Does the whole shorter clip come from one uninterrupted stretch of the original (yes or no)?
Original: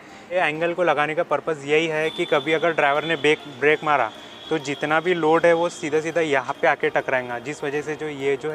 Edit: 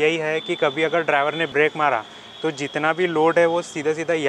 no